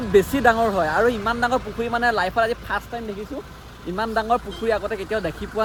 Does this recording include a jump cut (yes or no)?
no